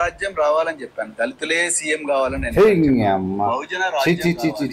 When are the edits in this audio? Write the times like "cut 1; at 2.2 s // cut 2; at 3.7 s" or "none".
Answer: none

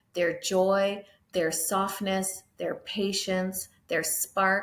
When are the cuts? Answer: none

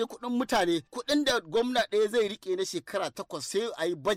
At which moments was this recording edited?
none

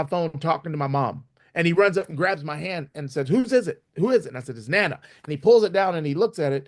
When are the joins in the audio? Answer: none

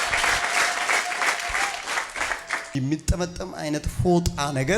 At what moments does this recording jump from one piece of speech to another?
cut 1; at 2.7 s

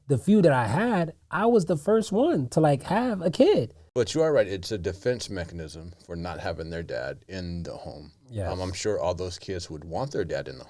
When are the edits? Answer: cut 1; at 3.8 s

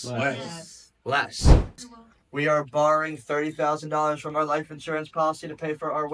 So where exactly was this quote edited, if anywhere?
cut 1; at 1.7 s

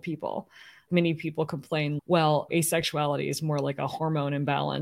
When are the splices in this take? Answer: cut 1; at 0.8 s // cut 2; at 2.0 s

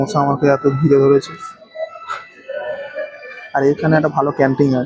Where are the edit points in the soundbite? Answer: none

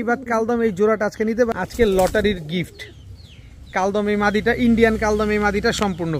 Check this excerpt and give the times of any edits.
cut 1; at 1.5 s

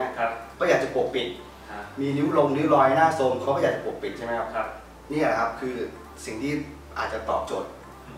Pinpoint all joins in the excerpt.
none

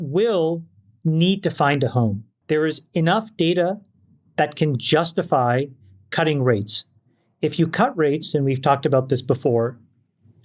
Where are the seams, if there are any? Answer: cut 1; at 2.3 s

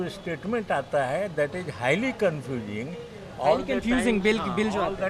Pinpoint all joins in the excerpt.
none

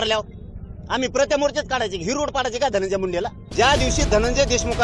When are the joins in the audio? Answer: cut 1; at 3.4 s

